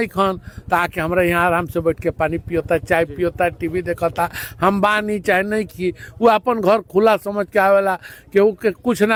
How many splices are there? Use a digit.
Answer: 0